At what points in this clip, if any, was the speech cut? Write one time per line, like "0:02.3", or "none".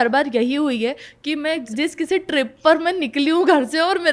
0:01.6